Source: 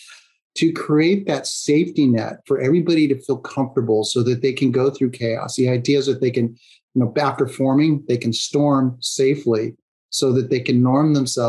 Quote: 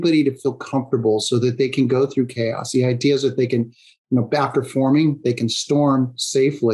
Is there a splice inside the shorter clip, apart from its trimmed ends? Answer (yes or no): no